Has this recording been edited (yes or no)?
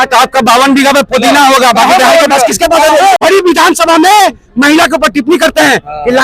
yes